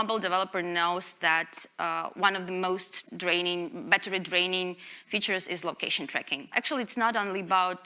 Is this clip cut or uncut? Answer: cut